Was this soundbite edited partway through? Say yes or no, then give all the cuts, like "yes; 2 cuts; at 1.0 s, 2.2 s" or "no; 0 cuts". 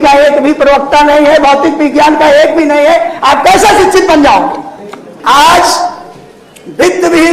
yes; 1 cut; at 5.1 s